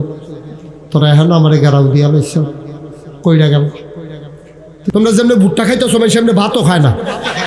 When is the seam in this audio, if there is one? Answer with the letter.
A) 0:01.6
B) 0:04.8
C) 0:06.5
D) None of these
B